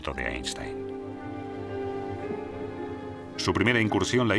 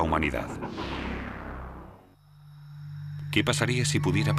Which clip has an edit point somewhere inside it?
first; 1 cut; at 2.7 s

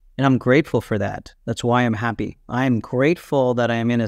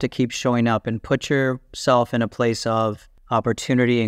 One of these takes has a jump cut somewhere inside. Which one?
second; 1 cut; at 3.1 s

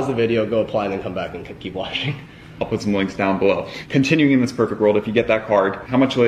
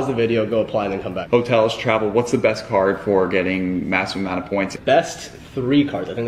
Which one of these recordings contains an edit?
second; 2 cuts; at 1.2 s, 4.7 s

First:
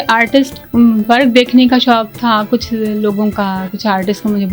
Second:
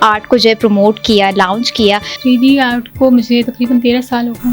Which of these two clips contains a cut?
second; 1 cut; at 2.1 s

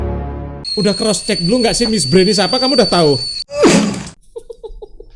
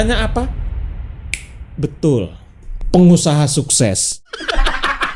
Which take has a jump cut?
second; 1 cut; at 4.2 s

